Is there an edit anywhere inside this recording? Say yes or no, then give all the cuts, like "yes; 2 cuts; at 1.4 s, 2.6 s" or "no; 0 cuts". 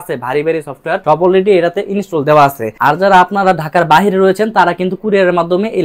yes; 2 cuts; at 1.0 s, 2.7 s